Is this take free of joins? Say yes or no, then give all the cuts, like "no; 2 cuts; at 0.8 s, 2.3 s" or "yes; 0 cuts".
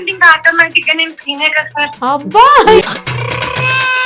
no; 2 cuts; at 2.0 s, 2.8 s